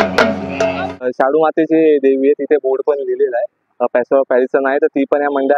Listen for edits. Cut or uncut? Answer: cut